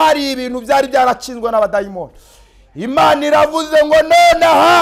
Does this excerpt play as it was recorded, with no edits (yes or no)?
yes